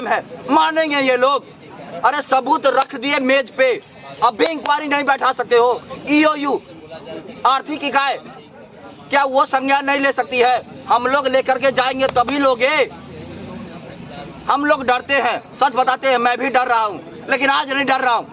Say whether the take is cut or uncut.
uncut